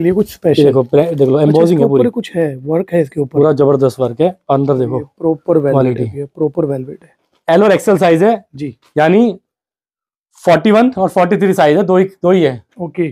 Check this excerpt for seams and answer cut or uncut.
uncut